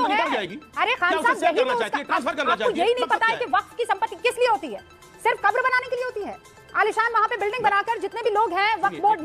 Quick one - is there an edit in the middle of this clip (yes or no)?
no